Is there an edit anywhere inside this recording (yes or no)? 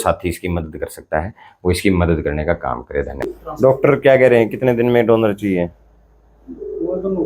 yes